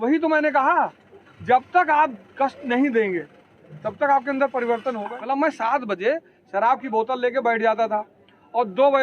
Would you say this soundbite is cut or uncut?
cut